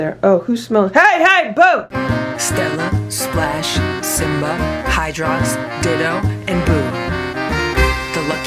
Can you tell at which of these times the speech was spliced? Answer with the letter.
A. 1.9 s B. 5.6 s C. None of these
A